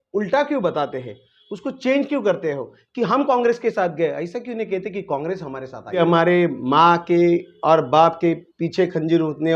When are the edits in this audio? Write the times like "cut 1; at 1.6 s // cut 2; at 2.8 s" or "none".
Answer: cut 1; at 6.0 s